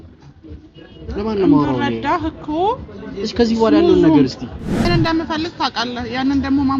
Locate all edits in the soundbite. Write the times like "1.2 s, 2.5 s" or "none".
4.8 s